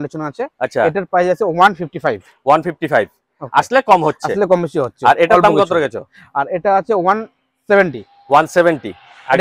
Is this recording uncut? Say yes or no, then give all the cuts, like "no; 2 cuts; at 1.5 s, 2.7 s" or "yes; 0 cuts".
yes; 0 cuts